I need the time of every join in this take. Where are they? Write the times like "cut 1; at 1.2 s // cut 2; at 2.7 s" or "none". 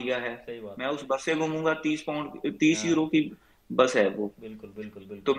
none